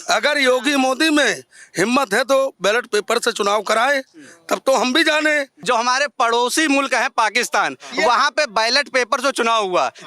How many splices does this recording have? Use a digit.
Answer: 1